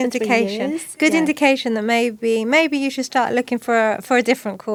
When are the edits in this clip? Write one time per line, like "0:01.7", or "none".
none